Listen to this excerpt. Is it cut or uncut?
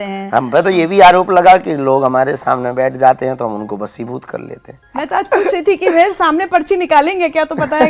cut